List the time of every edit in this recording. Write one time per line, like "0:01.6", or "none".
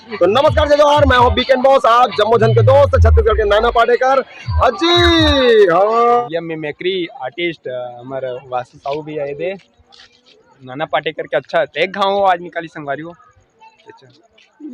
0:06.2